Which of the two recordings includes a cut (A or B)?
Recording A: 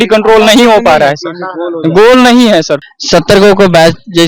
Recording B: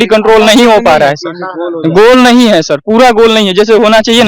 A